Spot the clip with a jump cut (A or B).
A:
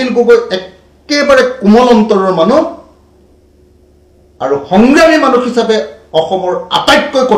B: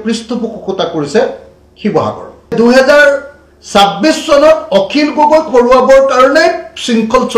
B